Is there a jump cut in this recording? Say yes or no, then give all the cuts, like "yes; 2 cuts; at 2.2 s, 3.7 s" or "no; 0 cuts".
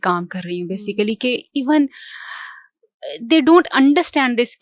no; 0 cuts